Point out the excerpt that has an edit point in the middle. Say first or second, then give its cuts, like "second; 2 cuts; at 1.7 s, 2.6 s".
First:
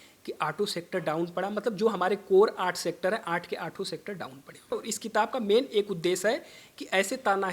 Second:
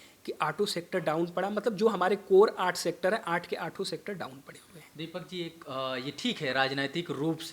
first; 1 cut; at 4.7 s